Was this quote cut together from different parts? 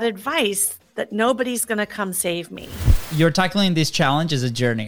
yes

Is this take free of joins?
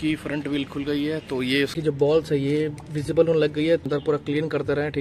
no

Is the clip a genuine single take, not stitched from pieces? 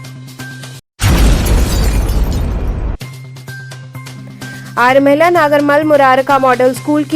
no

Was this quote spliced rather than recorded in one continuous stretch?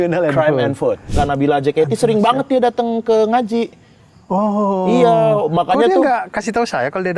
yes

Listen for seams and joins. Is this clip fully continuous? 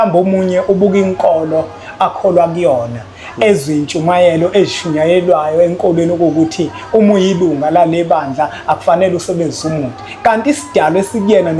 yes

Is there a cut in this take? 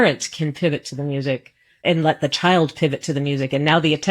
yes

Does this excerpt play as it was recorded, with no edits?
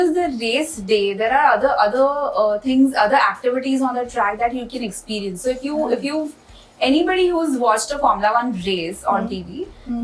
yes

